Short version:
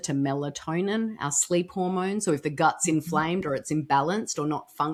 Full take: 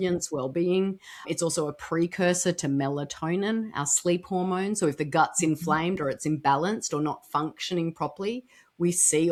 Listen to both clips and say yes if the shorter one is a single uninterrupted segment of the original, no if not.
yes